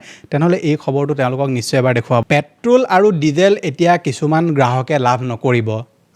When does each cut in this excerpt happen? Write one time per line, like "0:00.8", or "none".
0:02.2